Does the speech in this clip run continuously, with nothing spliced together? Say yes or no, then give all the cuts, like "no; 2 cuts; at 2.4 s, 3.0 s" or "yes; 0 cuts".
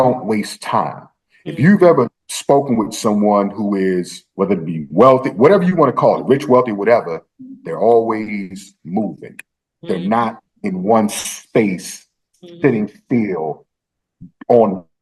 yes; 0 cuts